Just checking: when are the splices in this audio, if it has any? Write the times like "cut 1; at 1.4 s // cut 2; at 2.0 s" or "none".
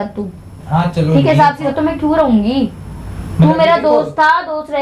cut 1; at 1.6 s